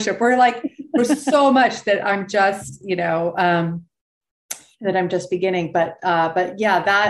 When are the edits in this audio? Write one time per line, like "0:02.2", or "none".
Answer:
none